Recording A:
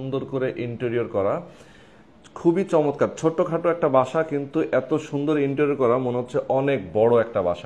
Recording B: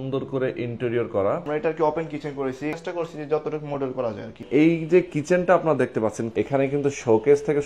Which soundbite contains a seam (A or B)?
B